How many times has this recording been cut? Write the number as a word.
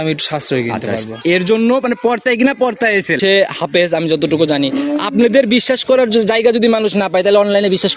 one